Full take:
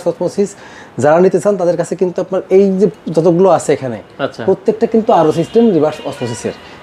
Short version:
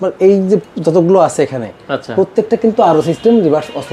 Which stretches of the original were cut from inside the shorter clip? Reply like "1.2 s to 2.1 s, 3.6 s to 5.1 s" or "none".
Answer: none